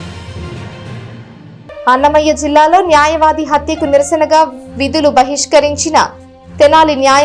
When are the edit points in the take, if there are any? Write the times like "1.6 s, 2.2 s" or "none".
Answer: none